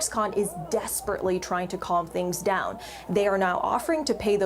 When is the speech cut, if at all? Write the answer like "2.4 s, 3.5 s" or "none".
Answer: 3.6 s